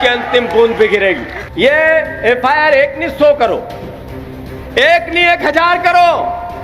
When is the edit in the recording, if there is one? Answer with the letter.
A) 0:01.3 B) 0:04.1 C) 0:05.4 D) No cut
A